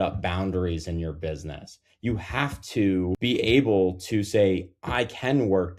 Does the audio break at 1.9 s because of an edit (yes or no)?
no